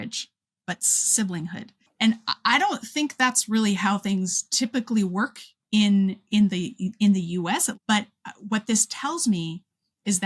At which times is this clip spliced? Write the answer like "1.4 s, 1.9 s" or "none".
1.9 s, 7.7 s